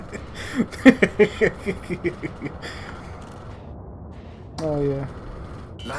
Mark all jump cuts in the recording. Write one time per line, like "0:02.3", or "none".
none